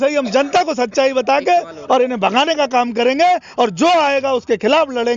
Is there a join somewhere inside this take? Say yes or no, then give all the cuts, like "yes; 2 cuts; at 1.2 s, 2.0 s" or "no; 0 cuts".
no; 0 cuts